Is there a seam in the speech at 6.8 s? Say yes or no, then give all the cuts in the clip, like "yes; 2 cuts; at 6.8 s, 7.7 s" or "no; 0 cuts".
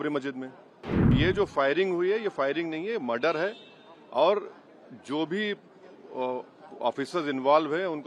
no; 1 cut; at 0.9 s